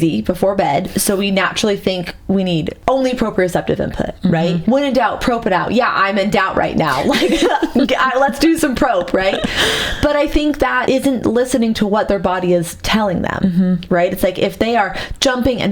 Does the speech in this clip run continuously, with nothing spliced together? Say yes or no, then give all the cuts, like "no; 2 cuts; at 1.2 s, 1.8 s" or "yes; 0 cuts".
no; 3 cuts; at 2.7 s, 4.6 s, 10.8 s